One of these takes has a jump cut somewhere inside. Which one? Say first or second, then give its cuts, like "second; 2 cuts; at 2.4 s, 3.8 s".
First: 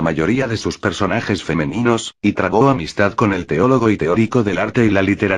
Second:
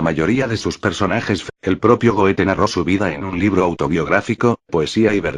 first; 1 cut; at 1.5 s